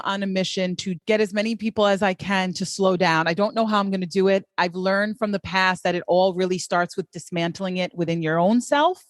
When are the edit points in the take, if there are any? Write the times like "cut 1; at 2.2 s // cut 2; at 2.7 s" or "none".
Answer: cut 1; at 1.0 s // cut 2; at 4.5 s